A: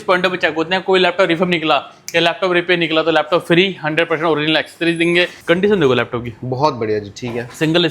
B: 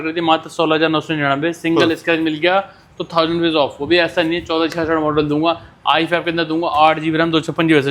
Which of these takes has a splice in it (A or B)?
A